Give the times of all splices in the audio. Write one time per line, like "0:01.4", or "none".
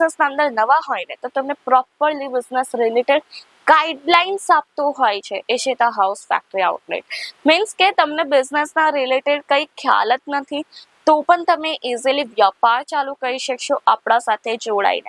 none